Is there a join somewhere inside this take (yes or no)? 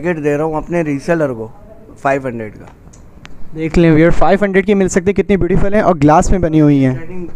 no